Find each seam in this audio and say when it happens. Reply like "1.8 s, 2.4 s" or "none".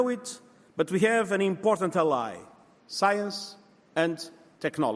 none